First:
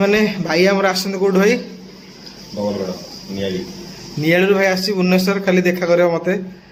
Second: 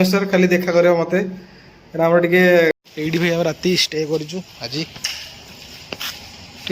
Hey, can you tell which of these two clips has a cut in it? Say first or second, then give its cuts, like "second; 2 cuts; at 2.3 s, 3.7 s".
second; 1 cut; at 2.8 s